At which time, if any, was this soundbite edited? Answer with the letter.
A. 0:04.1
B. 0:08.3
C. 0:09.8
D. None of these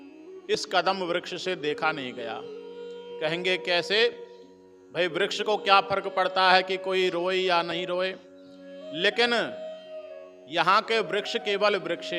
D